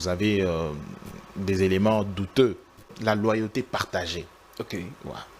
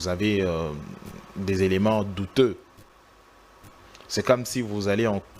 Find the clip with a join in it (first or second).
first